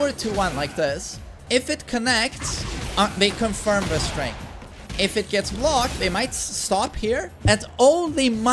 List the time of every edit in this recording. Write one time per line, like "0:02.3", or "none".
0:01.4
0:04.8